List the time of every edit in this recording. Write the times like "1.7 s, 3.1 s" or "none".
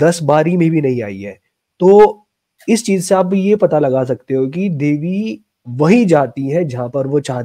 none